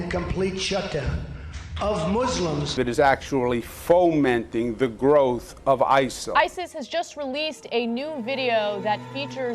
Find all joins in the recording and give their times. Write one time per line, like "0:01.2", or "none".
0:01.1

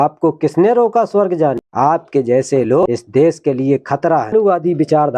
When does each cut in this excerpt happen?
0:01.6
0:02.8
0:04.3

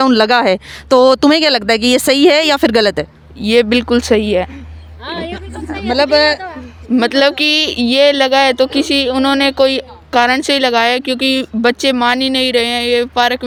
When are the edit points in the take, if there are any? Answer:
none

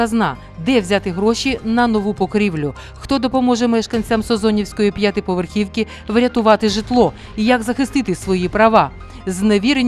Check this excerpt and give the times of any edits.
none

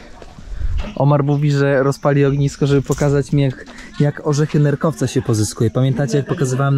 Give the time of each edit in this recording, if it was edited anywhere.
0:00.9

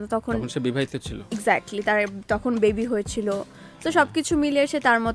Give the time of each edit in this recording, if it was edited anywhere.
none

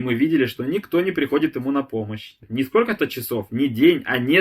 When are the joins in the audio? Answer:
0:02.4

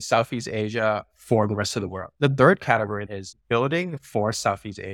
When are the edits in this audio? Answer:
0:02.1
0:03.0

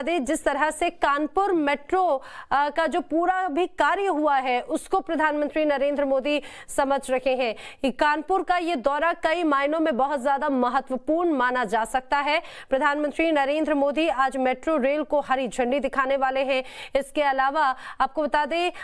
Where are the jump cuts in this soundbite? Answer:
0:13.5

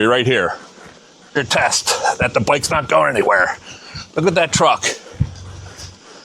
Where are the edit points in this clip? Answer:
0:01.4

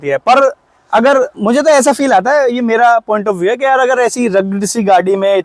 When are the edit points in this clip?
none

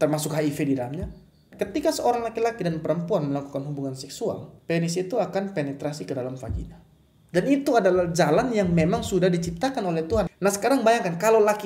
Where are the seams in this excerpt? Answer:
0:01.5
0:04.5
0:10.3

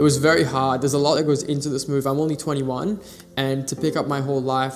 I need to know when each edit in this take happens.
0:01.2

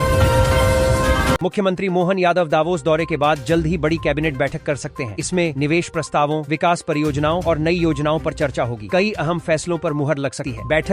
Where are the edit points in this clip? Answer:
0:01.4

